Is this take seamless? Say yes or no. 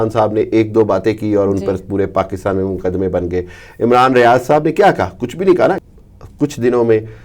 no